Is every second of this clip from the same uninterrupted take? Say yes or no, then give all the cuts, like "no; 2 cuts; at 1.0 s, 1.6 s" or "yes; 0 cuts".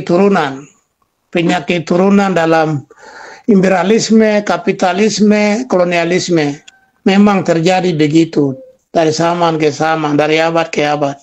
yes; 0 cuts